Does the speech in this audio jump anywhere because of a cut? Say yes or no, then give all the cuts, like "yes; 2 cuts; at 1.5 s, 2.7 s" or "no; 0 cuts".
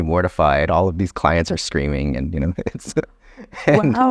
no; 0 cuts